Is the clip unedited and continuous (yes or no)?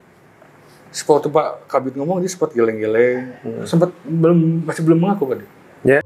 yes